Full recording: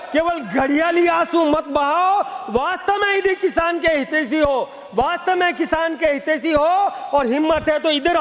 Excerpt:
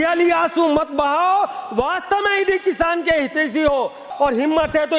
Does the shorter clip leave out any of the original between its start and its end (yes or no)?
yes